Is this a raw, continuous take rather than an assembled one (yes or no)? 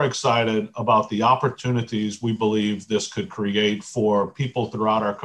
yes